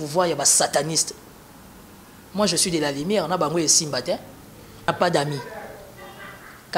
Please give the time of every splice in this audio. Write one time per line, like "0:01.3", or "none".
0:04.9